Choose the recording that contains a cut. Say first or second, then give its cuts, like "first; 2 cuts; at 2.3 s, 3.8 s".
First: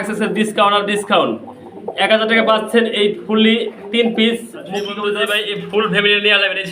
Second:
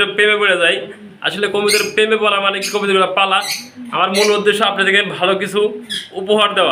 first; 1 cut; at 5.1 s